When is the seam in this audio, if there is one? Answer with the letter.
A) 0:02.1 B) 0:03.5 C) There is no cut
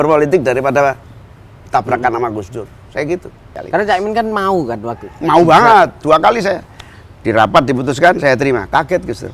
B